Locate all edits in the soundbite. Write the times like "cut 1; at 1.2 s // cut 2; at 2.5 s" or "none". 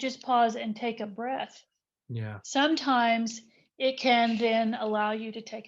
cut 1; at 1.1 s